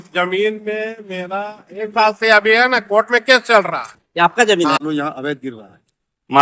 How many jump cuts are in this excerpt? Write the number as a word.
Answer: one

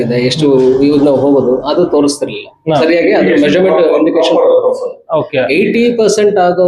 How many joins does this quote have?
zero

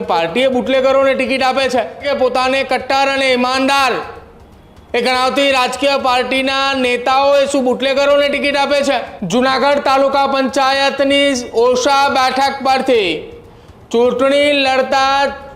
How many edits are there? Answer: two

